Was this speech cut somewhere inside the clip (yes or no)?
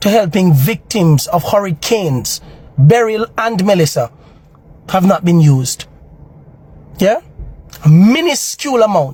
no